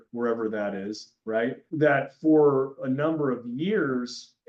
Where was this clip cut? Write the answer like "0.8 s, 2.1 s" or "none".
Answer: none